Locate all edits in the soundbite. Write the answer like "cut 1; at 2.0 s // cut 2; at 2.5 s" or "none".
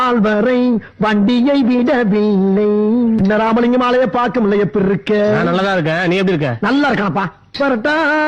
none